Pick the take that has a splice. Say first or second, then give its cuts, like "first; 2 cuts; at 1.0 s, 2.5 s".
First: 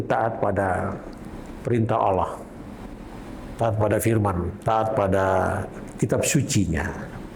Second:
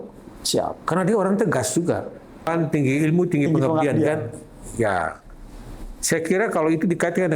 second; 1 cut; at 2.5 s